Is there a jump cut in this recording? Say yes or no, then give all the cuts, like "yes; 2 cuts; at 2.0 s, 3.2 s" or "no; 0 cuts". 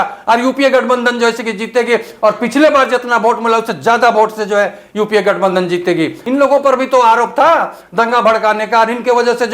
yes; 1 cut; at 6.2 s